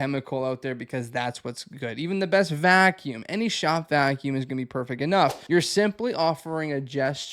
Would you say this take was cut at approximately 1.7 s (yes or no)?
no